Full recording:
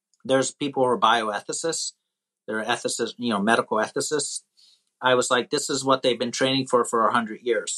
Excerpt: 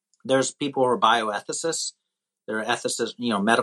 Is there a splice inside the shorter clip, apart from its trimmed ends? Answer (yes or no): no